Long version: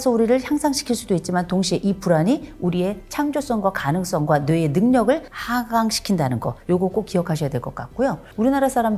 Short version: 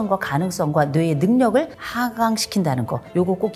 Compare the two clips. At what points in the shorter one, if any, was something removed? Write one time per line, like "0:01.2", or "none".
none